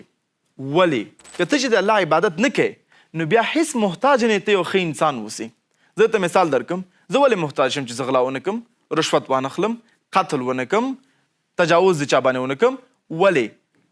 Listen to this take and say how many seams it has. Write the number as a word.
one